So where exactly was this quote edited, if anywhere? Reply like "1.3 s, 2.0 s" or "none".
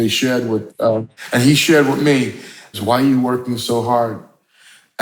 1.1 s, 2.7 s